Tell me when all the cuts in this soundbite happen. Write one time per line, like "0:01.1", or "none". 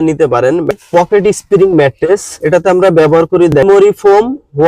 0:00.8
0:02.4
0:03.6

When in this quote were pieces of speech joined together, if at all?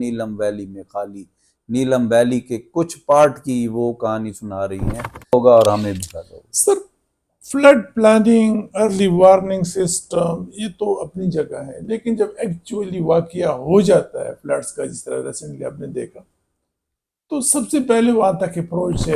0:05.3

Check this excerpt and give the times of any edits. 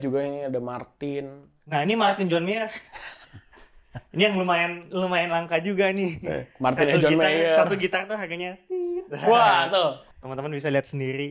none

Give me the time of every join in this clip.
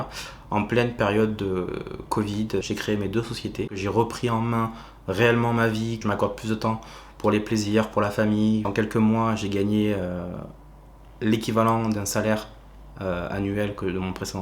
0:02.6
0:03.7
0:06.0
0:08.7

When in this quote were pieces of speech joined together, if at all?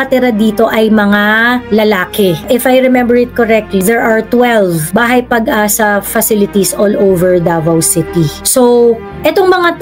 0:01.6
0:02.4
0:03.8
0:04.8

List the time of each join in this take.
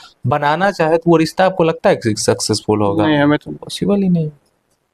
none

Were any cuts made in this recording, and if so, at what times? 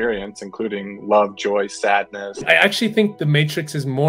0:02.4

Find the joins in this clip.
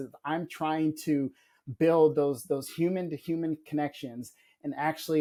none

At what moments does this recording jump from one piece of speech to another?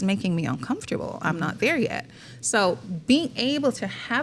none

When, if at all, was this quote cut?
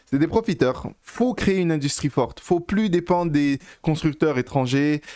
0:00.9

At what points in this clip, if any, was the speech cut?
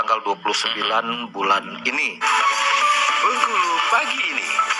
0:02.2

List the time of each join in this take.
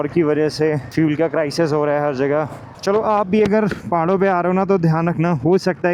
none

